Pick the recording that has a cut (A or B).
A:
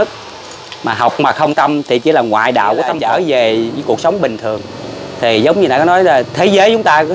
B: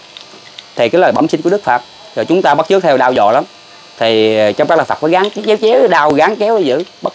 A